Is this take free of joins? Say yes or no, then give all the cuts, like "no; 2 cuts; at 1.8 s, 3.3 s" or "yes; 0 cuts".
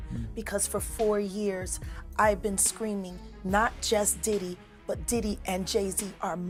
yes; 0 cuts